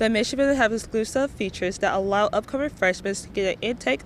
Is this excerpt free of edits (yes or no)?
yes